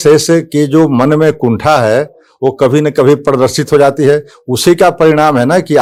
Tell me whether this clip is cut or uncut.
uncut